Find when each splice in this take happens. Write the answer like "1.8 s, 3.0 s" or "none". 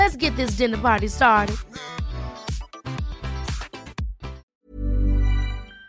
4.7 s